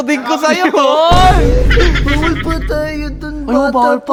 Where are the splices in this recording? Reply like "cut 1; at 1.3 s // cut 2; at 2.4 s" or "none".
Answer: none